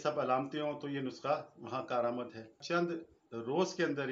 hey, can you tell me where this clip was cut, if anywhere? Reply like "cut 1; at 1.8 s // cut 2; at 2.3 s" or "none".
cut 1; at 2.6 s